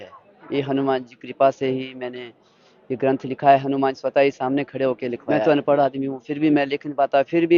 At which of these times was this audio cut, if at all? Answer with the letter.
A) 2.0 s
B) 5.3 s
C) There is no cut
B